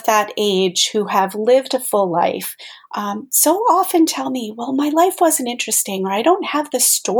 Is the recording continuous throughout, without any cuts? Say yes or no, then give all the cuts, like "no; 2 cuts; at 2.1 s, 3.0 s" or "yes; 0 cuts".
yes; 0 cuts